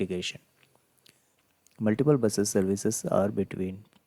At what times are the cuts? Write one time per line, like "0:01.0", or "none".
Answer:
0:01.4